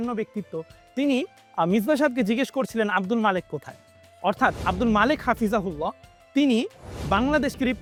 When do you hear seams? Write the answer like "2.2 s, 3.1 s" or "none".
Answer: none